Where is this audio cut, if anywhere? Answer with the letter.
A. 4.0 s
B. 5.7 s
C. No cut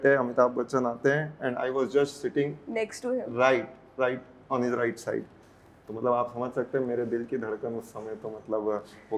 C